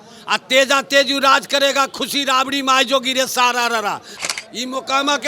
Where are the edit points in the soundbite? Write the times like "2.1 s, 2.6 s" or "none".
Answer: 4.1 s

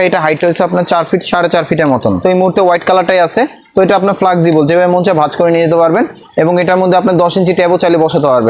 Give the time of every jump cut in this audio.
2.2 s

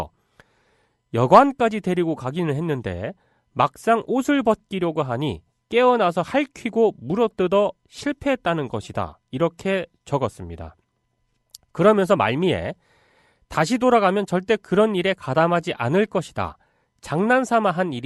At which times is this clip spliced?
7.9 s

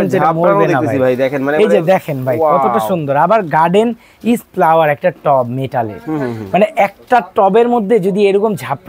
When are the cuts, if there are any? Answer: none

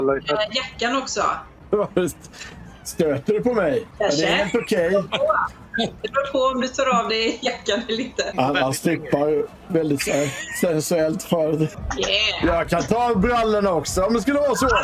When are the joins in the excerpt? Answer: 1.5 s, 3.9 s, 8.3 s, 11.8 s

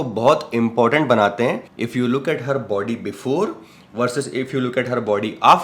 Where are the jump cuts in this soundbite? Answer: 1.7 s

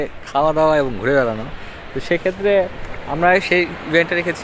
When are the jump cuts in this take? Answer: none

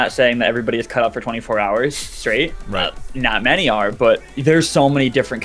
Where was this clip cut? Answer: 2.9 s, 4.3 s

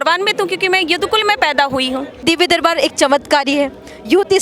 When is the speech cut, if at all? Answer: 2.2 s

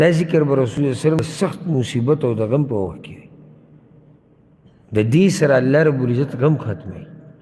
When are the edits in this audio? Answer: 1.2 s

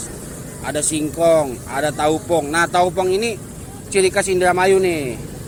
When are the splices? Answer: none

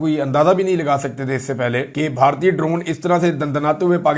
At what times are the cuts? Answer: 1.9 s

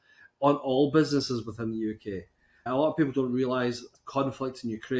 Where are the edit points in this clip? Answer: 2.7 s, 3.9 s

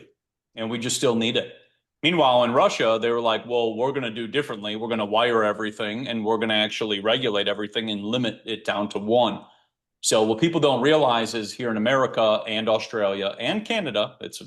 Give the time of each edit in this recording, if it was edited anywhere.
none

